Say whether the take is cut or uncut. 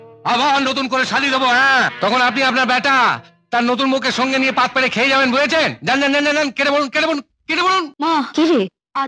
cut